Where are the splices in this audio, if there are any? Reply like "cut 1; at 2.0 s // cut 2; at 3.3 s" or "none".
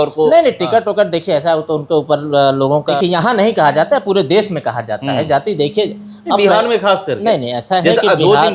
cut 1; at 2.9 s